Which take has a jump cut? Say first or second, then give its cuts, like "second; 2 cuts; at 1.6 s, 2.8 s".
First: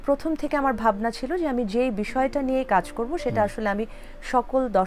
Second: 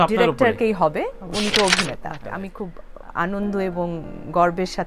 second; 1 cut; at 2.2 s